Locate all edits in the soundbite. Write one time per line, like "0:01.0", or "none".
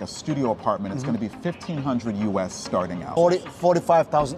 0:03.1